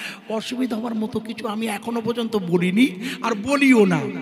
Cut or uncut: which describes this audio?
uncut